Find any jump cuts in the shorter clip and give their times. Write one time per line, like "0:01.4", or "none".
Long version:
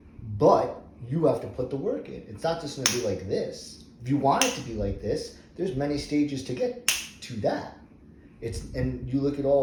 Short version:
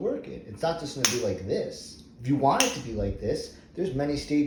none

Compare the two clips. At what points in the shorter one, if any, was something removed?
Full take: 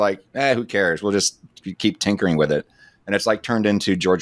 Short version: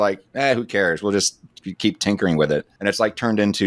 0:02.7

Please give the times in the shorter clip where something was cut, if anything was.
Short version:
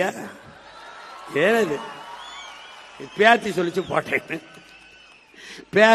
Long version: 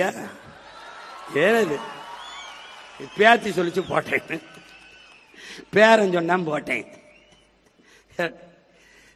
none

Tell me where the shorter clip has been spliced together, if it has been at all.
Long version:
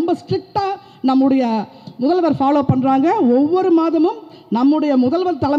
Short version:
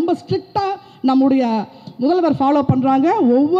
none

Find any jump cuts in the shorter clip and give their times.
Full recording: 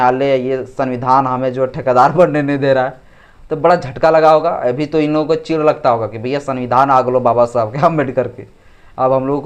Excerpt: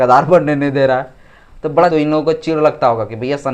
0:01.9

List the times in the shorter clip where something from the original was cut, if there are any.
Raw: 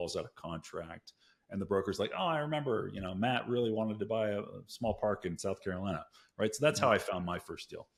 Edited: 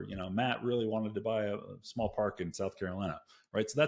none

